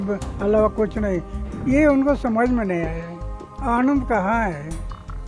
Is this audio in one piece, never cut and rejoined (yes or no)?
no